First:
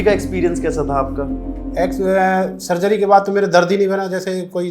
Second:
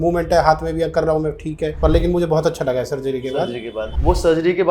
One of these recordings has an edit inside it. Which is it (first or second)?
second